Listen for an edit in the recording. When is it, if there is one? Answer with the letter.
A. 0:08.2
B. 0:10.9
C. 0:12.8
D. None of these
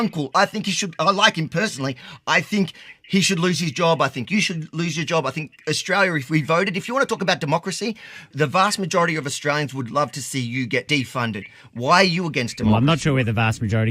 B